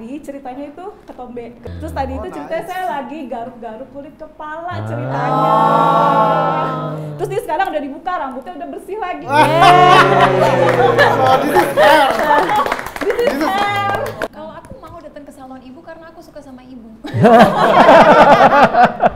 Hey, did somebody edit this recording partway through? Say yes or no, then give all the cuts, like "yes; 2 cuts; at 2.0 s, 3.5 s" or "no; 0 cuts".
yes; 1 cut; at 14.3 s